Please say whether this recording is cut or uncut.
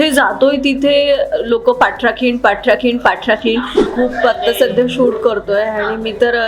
cut